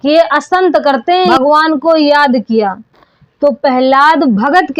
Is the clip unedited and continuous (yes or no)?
no